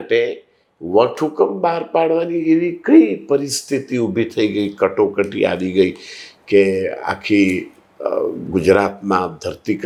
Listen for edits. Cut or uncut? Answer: uncut